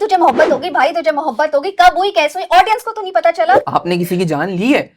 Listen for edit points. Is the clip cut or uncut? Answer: cut